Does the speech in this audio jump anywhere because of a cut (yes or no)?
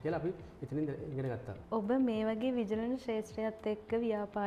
no